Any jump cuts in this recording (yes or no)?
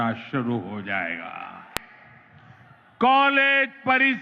yes